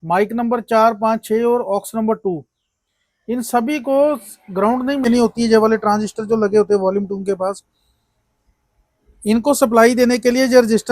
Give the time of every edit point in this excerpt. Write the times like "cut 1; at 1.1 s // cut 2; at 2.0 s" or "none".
cut 1; at 5.0 s